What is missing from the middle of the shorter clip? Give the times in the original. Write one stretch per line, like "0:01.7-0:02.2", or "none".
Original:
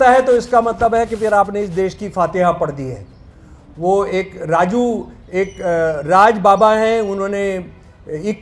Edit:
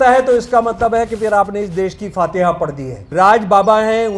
0:03.1-0:06.0